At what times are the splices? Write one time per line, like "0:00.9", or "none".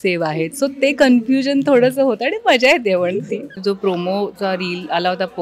0:03.5